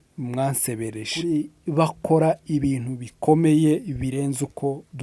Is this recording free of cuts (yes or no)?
no